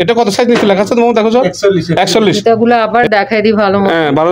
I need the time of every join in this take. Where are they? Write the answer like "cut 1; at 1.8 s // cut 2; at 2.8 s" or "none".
cut 1; at 2.4 s